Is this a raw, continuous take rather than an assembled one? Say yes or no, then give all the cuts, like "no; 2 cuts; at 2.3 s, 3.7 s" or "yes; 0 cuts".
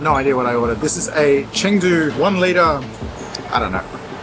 no; 1 cut; at 2.1 s